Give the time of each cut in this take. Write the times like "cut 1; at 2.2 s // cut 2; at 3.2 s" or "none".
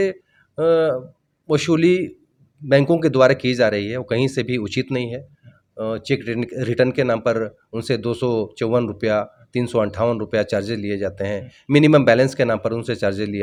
none